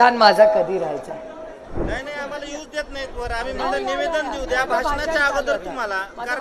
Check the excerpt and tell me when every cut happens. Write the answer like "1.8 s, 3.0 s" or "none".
1.8 s